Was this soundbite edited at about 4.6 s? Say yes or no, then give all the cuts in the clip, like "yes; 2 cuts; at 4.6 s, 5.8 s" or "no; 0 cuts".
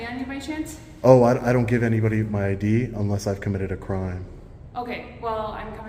no; 0 cuts